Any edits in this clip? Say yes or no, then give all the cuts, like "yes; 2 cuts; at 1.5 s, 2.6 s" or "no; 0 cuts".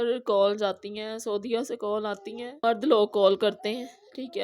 yes; 1 cut; at 2.5 s